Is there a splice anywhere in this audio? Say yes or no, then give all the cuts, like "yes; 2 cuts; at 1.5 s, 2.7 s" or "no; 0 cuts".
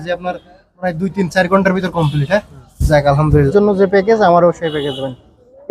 yes; 1 cut; at 3.4 s